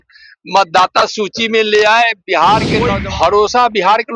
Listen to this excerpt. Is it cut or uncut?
cut